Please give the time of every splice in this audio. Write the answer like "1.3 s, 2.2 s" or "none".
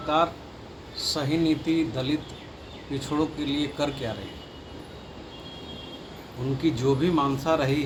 none